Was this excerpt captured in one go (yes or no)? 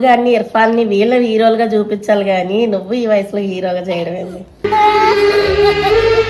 yes